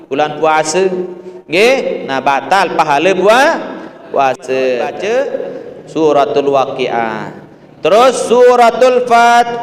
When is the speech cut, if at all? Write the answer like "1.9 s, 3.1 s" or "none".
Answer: none